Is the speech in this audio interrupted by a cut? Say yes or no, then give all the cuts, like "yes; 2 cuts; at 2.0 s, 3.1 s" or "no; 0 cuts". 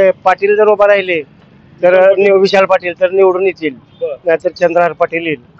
no; 0 cuts